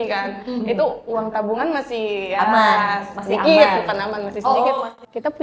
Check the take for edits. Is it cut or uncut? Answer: uncut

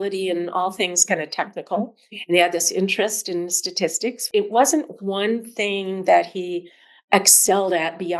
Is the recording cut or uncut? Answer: cut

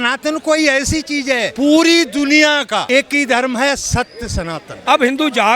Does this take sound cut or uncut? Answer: cut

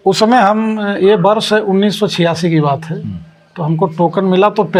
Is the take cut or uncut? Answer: uncut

